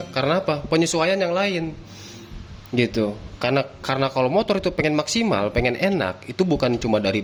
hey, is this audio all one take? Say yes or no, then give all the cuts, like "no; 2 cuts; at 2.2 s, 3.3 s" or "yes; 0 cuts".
yes; 0 cuts